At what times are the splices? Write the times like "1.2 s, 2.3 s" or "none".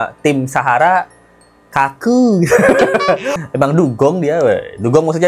3.3 s